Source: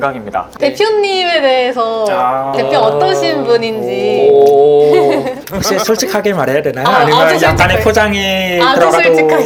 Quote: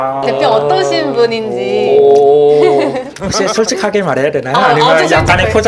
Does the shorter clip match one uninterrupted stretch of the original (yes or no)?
yes